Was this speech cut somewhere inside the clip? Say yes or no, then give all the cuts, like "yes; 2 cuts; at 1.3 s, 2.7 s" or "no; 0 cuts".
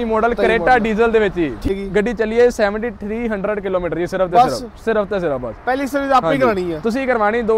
yes; 1 cut; at 1.7 s